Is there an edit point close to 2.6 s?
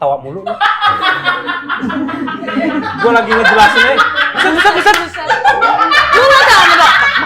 no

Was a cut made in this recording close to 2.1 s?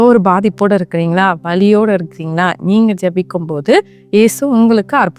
no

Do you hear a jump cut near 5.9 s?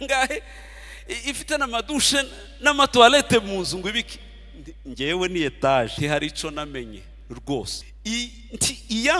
yes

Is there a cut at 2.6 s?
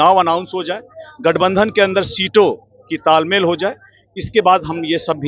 no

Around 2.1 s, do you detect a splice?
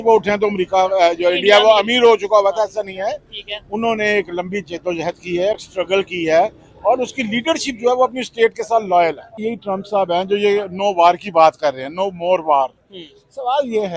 no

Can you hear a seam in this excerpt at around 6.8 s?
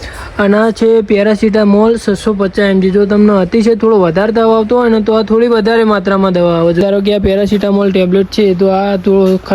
yes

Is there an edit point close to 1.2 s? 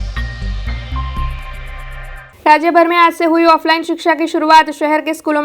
yes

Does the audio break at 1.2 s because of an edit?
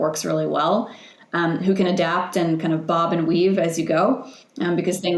no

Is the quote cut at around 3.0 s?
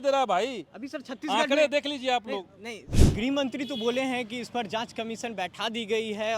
yes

